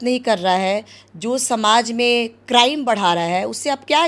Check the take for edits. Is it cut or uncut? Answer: uncut